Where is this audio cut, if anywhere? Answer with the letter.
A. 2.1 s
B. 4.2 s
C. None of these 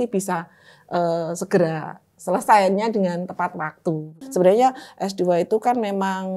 B